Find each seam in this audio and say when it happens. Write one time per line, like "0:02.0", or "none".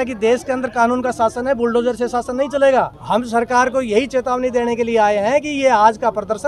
0:03.0